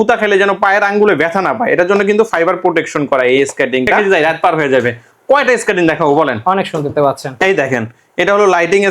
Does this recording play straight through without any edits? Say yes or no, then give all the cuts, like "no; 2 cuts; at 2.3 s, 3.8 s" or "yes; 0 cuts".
no; 1 cut; at 4.1 s